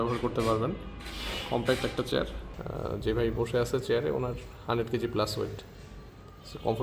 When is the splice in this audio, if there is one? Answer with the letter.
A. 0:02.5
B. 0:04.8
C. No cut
A